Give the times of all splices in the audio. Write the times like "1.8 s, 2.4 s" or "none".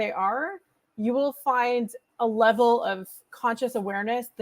2.0 s